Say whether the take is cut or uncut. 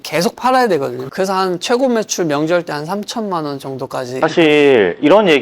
cut